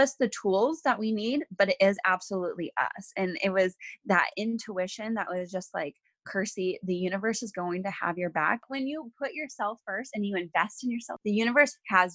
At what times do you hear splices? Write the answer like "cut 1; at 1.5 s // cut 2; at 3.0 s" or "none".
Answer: cut 1; at 8.7 s // cut 2; at 11.1 s